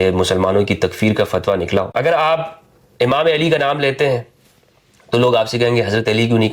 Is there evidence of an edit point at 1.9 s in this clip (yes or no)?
yes